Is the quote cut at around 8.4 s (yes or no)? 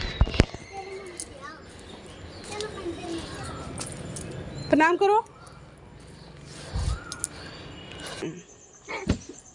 yes